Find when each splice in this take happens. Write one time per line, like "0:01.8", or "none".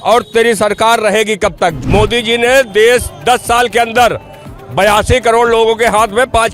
0:01.8